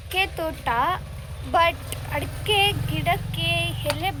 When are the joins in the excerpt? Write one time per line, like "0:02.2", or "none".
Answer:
none